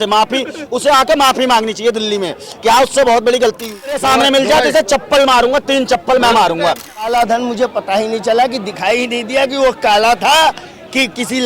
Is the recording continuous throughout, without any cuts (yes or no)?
no